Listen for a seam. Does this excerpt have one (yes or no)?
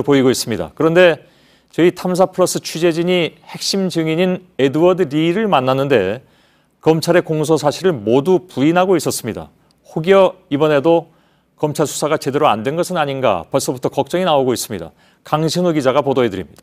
yes